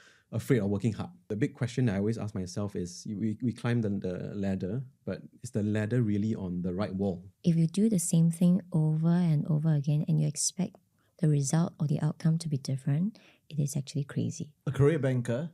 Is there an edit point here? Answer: yes; 3 cuts; at 1.3 s, 7.3 s, 14.5 s

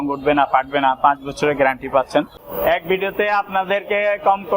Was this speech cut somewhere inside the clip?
yes; 1 cut; at 2.4 s

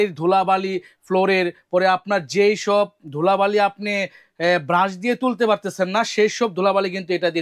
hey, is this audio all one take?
yes; 0 cuts

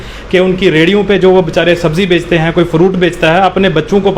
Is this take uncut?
yes; 0 cuts

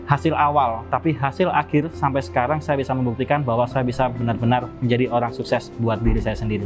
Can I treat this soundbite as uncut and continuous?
yes; 0 cuts

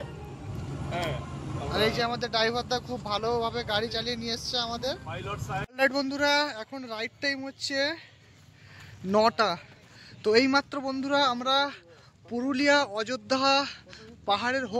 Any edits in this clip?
yes; 1 cut; at 5.7 s

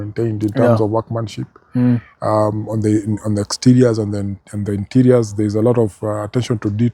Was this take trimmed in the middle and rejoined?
no; 0 cuts

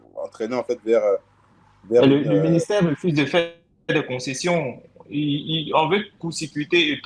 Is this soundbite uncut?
yes; 0 cuts

